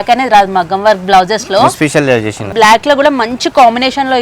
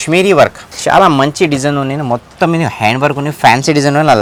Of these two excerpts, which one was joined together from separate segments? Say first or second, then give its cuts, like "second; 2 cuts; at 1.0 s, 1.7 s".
first; 1 cut; at 2.5 s